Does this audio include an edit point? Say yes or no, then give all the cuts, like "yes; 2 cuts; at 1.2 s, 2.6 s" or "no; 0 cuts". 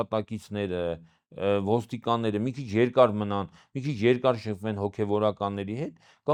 no; 0 cuts